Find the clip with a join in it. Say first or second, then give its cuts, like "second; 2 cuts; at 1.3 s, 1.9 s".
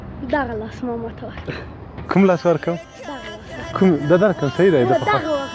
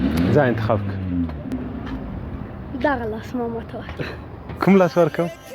second; 1 cut; at 1.5 s